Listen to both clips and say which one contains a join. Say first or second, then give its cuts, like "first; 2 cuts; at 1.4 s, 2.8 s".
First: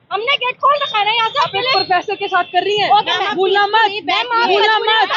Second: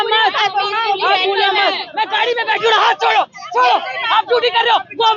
second; 1 cut; at 1.9 s